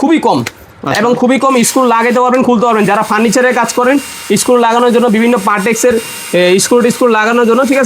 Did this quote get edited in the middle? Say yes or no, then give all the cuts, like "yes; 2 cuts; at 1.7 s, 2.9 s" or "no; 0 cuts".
no; 0 cuts